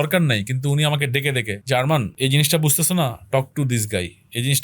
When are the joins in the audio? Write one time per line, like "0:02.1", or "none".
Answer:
0:01.5
0:02.1